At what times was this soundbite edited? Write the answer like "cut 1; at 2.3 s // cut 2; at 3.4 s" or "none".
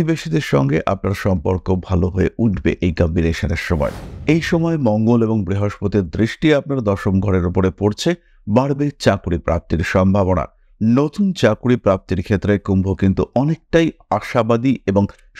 none